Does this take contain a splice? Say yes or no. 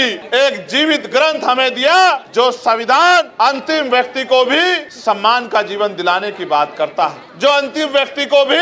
no